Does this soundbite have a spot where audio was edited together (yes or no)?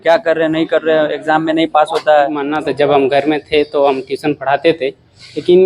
yes